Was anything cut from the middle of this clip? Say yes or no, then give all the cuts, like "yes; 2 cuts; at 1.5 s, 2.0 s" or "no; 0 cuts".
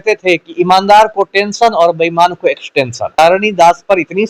yes; 1 cut; at 3.1 s